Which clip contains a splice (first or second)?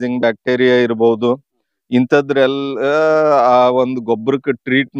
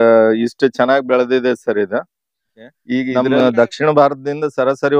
second